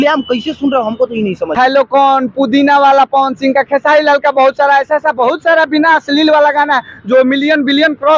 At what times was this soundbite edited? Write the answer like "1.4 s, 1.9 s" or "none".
1.6 s